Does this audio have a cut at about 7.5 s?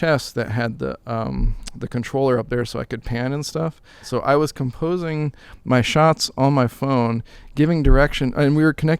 no; 1 cut; at 4.0 s

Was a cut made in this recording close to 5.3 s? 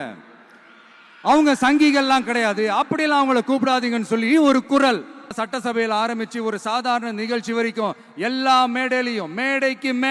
yes; 1 cut; at 5.3 s

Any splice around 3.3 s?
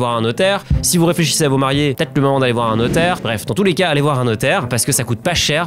yes; 1 cut; at 3.3 s

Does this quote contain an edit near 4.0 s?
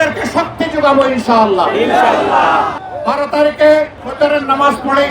yes; 2 cuts; at 2.8 s, 4.0 s

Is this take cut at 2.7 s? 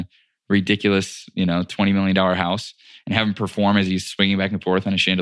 no; 0 cuts

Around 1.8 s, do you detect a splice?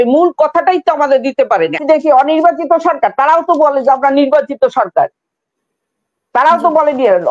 yes; 1 cut; at 1.8 s

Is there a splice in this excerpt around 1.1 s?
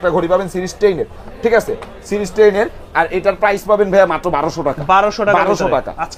no; 0 cuts

